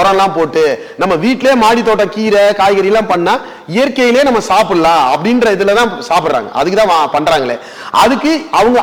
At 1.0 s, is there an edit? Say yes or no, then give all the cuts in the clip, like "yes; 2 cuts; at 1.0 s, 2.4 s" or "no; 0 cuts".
no; 0 cuts